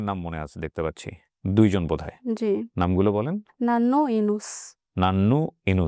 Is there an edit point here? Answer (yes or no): no